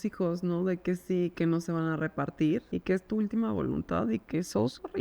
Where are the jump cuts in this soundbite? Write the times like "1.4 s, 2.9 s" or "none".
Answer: 1.3 s, 2.7 s